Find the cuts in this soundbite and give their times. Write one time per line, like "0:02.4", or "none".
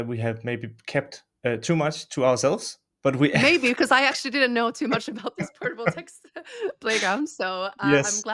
none